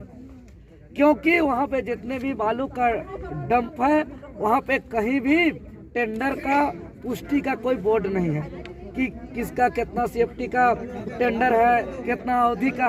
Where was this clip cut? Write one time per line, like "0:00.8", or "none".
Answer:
none